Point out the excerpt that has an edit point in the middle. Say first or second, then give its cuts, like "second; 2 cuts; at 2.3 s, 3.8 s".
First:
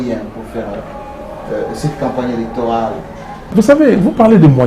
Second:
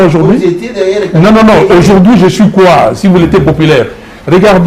first; 1 cut; at 3.5 s